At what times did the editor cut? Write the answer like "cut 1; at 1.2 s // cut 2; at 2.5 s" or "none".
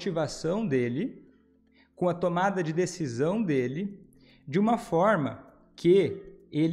none